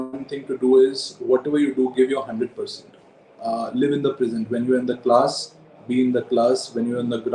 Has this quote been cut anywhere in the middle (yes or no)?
no